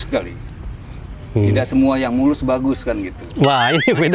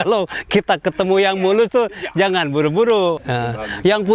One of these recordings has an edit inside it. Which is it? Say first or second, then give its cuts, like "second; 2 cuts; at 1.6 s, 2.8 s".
second; 1 cut; at 3.2 s